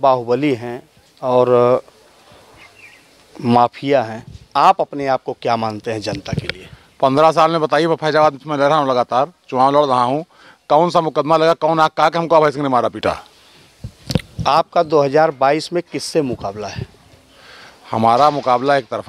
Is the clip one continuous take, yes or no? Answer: yes